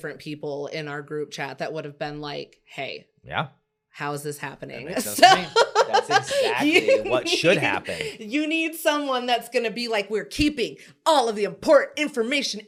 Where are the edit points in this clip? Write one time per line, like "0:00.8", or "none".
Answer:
none